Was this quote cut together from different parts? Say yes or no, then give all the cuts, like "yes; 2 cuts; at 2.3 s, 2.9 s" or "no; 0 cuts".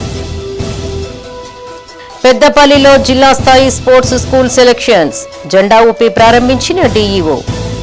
no; 0 cuts